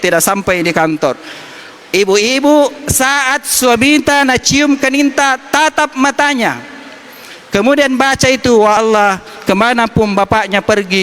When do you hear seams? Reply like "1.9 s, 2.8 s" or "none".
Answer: 8.8 s